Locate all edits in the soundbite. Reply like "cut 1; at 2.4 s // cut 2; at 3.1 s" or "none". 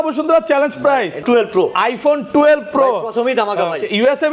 cut 1; at 1.2 s